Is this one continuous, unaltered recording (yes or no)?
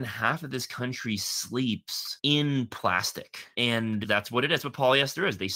yes